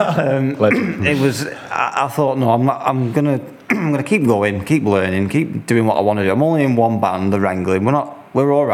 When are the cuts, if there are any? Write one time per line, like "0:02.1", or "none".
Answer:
none